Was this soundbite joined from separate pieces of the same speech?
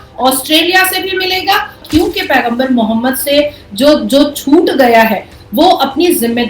yes; 1 cut; at 1.8 s

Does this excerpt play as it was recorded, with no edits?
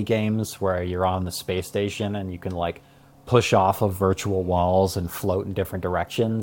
yes; 0 cuts

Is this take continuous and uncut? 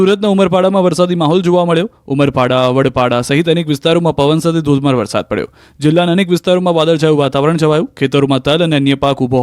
no; 1 cut; at 2.0 s

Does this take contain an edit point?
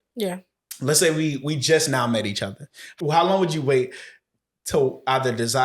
yes; 1 cut; at 2.8 s

